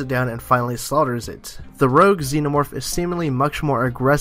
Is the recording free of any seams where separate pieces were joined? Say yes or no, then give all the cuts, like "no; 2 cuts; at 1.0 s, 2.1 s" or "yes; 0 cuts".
no; 1 cut; at 1.1 s